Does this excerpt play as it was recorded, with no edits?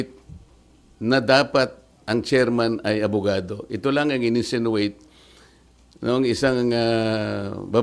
yes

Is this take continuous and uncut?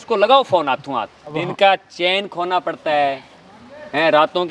no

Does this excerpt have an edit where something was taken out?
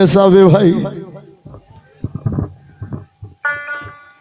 no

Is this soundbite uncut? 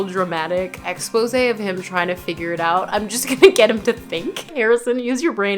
no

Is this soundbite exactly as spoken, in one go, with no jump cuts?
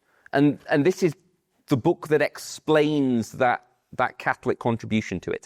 yes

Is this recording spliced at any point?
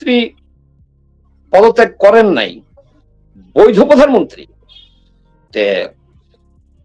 no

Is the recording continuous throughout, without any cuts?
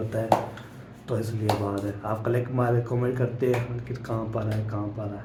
yes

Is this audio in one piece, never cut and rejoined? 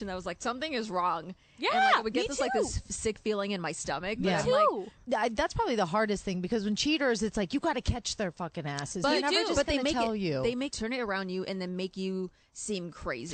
no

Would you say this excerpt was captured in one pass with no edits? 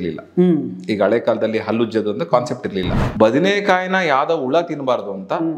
no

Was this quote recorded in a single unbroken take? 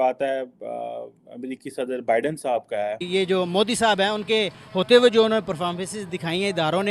no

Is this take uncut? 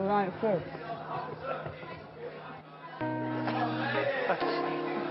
yes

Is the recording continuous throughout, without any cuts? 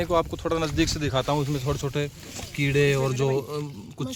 yes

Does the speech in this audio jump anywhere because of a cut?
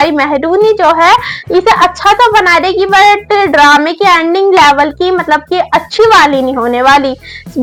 no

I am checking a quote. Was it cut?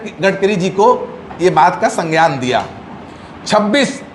no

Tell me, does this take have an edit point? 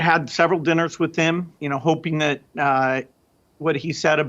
yes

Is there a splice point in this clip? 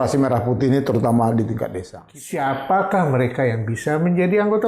yes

